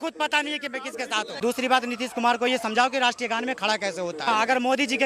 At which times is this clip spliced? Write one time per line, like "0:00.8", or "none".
0:01.4
0:04.3